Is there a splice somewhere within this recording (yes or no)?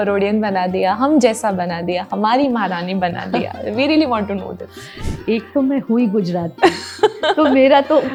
no